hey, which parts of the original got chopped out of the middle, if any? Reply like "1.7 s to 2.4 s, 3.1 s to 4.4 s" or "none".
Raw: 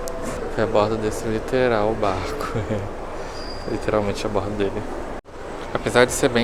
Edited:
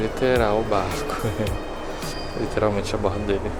none